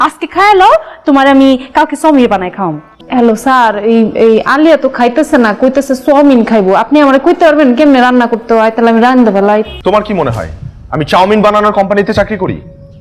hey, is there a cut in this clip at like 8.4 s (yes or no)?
no